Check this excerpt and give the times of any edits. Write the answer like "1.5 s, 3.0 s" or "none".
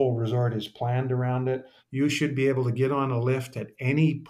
1.8 s